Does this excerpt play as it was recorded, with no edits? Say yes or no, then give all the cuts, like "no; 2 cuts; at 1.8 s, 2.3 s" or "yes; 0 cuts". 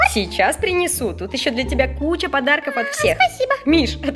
yes; 0 cuts